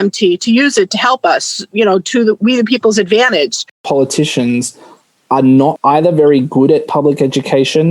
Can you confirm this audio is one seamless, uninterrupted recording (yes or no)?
no